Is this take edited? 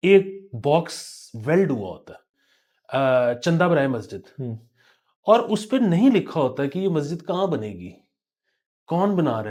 no; 0 cuts

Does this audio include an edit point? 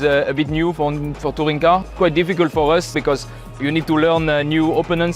yes; 2 cuts; at 1.9 s, 3.0 s

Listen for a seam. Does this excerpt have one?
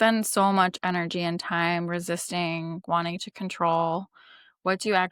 no; 0 cuts

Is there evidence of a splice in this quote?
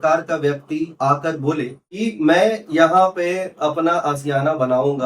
yes; 1 cut; at 2.0 s

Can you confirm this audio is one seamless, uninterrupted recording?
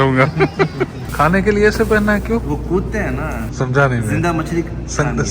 no; 2 cuts; at 1.0 s, 3.5 s

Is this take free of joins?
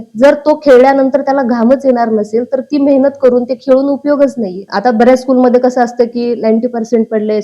no; 1 cut; at 4.7 s

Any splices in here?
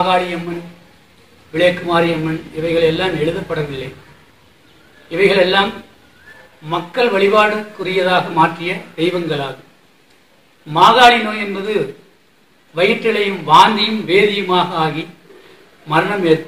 no; 0 cuts

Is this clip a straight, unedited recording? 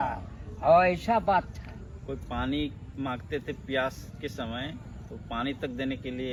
yes; 0 cuts

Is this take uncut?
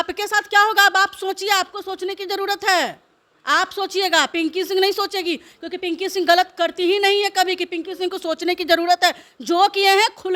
yes; 0 cuts

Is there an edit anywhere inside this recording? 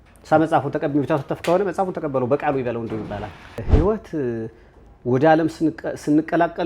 yes; 1 cut; at 3.6 s

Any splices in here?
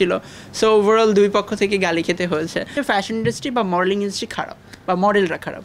yes; 1 cut; at 2.8 s

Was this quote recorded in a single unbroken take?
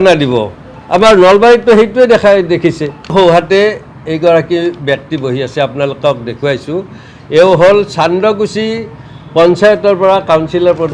no; 1 cut; at 3.0 s

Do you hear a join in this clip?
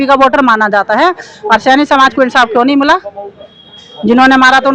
no; 0 cuts

